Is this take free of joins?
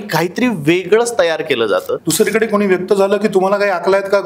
no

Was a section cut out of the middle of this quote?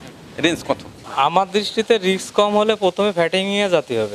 yes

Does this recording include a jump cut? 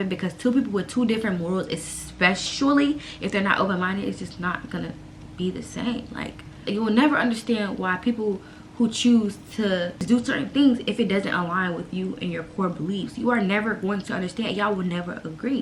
no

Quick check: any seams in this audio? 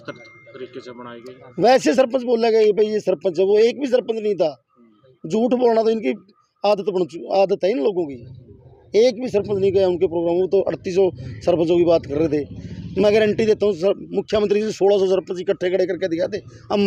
no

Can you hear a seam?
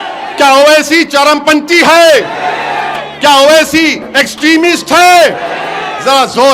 no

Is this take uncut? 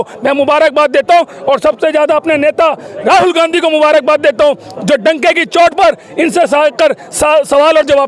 yes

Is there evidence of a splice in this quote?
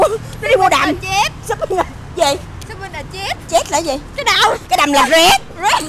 no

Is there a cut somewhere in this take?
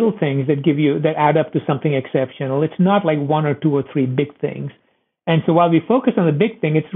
no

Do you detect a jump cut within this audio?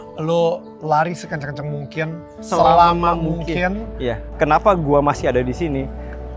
yes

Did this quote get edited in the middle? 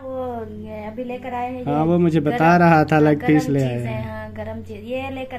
no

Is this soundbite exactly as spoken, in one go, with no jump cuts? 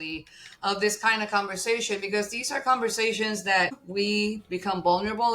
no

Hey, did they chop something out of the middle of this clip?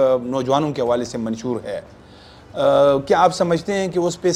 no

